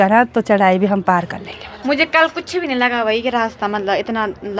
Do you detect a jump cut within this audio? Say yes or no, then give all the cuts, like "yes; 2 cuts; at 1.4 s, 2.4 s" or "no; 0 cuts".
no; 0 cuts